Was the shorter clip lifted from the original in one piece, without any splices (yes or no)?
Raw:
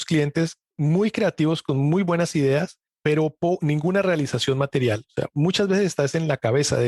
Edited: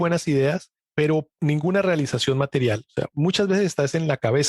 no